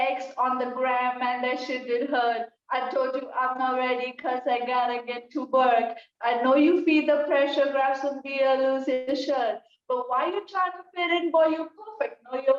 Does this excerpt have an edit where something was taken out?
no; 0 cuts

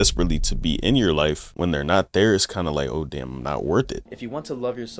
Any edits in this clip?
yes; 2 cuts; at 1.5 s, 4.0 s

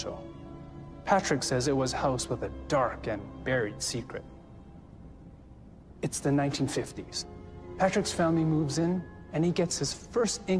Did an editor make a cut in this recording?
no; 0 cuts

